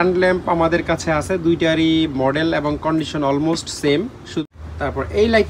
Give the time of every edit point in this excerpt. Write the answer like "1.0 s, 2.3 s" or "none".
4.4 s